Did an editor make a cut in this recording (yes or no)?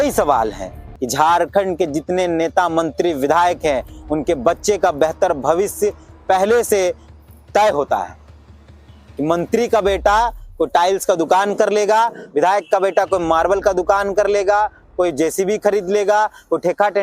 yes